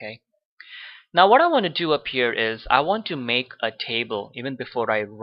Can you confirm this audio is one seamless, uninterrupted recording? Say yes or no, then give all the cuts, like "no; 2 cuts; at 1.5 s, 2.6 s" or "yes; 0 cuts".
no; 1 cut; at 1.4 s